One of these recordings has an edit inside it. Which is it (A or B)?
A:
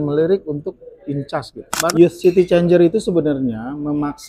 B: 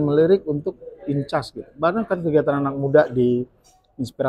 A